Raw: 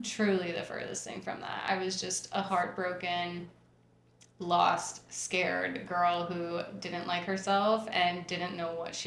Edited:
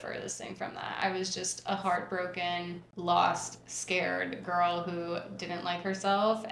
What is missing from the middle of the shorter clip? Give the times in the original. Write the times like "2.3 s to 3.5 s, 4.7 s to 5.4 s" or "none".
3.5 s to 4.3 s